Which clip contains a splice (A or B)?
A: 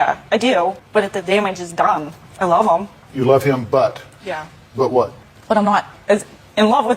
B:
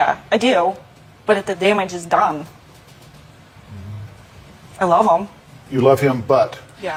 A